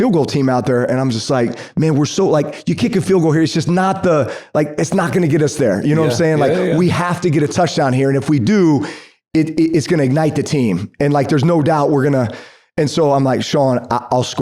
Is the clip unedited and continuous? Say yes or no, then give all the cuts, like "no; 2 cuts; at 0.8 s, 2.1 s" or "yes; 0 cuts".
yes; 0 cuts